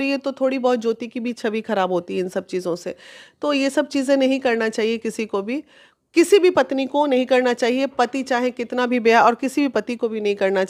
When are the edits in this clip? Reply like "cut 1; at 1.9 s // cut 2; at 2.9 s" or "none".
none